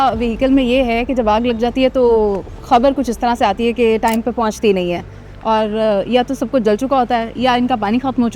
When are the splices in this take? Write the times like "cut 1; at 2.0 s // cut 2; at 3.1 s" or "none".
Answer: none